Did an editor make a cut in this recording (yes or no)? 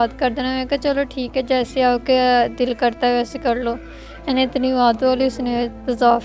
no